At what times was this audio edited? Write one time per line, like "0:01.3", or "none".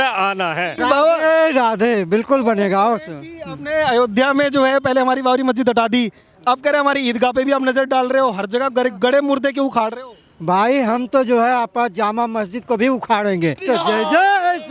0:00.8
0:13.6